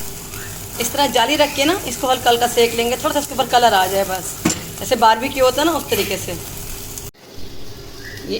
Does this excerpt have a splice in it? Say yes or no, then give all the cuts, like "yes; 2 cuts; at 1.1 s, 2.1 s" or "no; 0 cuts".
no; 0 cuts